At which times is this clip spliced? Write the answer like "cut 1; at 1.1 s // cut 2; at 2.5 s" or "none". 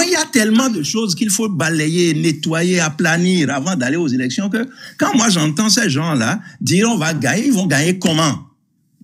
none